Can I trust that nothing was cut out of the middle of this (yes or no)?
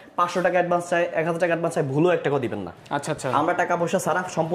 yes